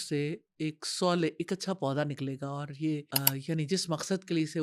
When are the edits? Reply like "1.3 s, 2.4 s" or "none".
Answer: 3.1 s